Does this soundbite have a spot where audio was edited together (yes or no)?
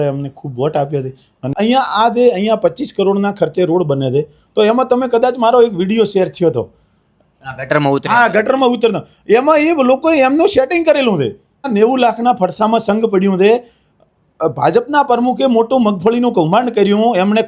yes